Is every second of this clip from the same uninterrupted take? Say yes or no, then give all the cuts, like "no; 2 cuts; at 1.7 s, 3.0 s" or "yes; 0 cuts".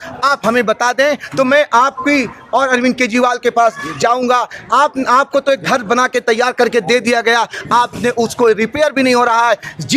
yes; 0 cuts